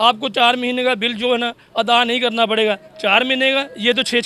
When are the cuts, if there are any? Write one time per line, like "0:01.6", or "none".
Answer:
none